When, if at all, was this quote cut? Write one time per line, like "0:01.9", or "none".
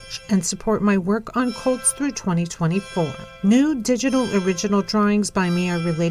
none